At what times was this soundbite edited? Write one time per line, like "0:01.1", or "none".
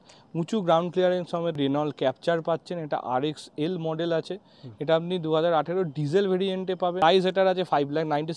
0:01.5
0:07.0